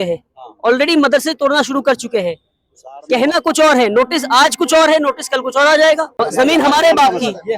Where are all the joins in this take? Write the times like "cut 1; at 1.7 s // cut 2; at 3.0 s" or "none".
cut 1; at 6.1 s